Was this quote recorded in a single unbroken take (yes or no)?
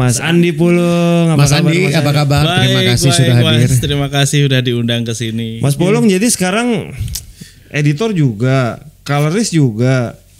no